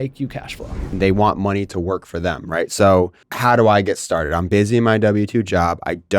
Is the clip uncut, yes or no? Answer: no